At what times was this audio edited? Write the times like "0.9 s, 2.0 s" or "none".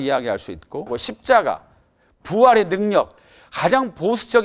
1.1 s